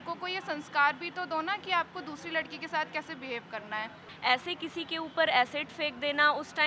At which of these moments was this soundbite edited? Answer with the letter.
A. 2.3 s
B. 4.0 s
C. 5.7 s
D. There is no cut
B